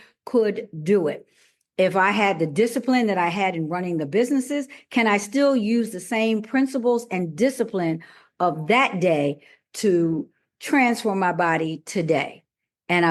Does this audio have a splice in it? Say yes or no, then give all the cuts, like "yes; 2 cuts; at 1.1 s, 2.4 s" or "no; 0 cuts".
no; 0 cuts